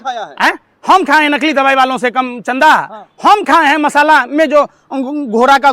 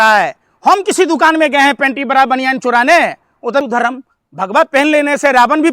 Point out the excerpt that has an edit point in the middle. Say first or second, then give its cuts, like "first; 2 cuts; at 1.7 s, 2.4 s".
second; 1 cut; at 3.6 s